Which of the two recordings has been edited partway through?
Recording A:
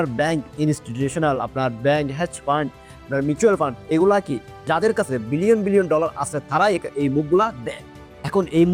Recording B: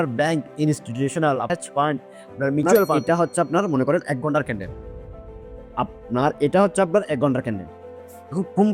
B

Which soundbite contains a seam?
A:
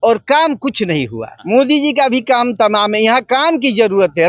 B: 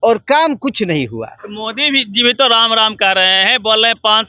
A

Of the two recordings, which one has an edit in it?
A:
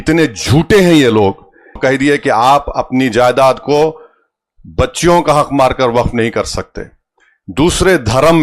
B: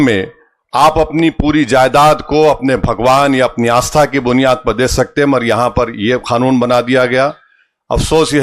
A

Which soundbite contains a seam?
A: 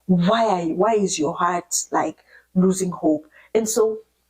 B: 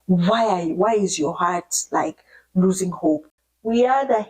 B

